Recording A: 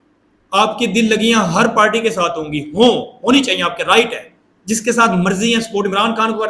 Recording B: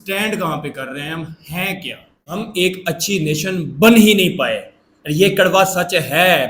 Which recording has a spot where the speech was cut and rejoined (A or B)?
B